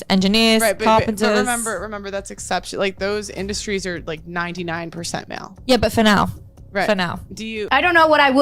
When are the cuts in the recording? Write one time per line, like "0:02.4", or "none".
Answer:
0:07.5